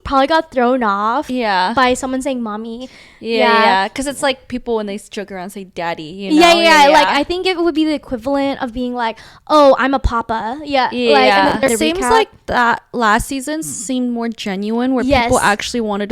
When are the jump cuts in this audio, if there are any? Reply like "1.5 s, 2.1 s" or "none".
11.7 s